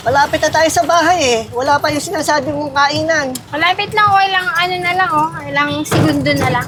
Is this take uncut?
yes; 0 cuts

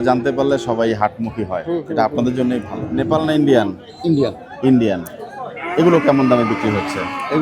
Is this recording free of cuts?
no; 1 cut; at 2.8 s

